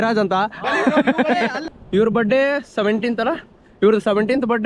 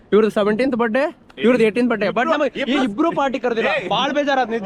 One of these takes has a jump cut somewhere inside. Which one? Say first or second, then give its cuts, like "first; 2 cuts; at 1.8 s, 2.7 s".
first; 1 cut; at 1.6 s